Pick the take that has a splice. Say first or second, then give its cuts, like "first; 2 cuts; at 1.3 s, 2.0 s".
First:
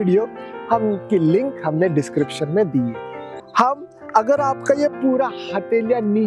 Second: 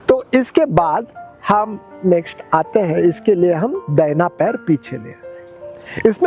first; 1 cut; at 3.4 s